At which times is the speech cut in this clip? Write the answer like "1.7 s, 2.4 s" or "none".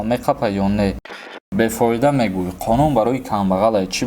1.4 s